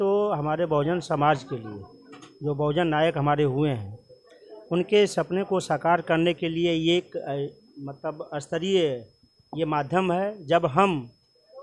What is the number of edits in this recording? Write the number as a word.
zero